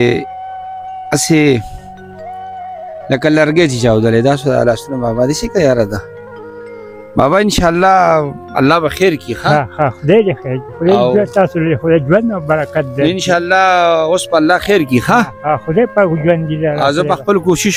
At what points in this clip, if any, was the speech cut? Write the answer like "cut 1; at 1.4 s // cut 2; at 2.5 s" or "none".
none